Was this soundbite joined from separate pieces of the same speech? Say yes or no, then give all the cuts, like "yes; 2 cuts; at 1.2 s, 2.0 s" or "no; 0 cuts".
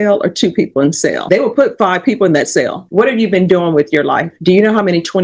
yes; 3 cuts; at 1.2 s, 2.8 s, 4.3 s